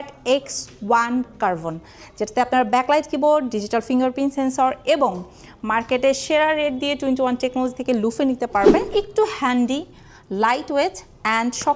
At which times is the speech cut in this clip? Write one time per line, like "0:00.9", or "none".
0:08.9